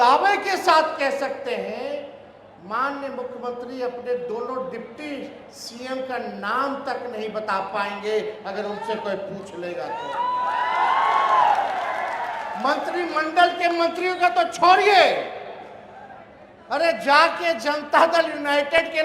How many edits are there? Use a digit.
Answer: 0